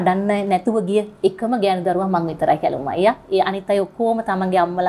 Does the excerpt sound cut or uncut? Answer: uncut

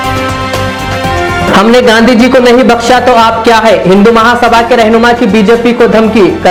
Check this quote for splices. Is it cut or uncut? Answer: uncut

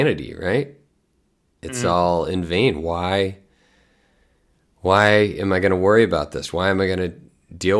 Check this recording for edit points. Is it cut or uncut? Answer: uncut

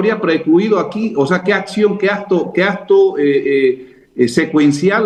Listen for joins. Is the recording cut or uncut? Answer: uncut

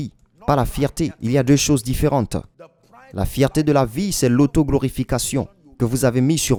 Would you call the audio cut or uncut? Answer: uncut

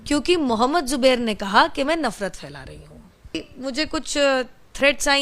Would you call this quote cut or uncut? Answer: cut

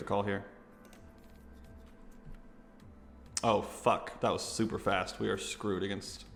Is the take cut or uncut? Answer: uncut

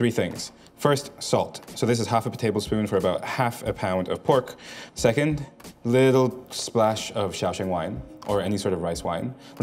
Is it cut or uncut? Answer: uncut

